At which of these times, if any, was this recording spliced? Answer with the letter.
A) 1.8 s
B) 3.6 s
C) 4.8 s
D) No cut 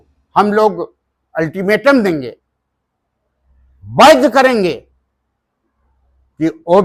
D